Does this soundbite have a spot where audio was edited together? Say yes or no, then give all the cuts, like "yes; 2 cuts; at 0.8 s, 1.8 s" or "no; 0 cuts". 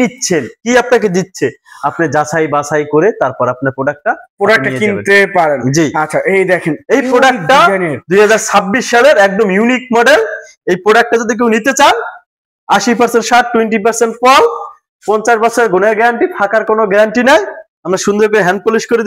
no; 0 cuts